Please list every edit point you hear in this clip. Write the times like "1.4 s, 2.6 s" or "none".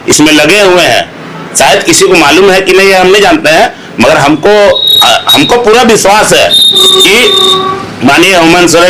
none